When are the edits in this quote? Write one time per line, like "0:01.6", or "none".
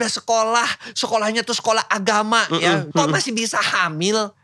0:02.9